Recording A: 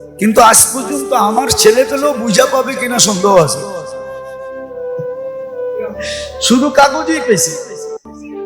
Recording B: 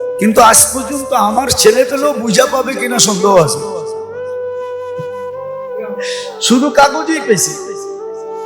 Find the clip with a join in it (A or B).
B